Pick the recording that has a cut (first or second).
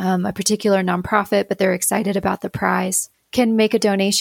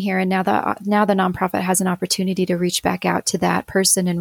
first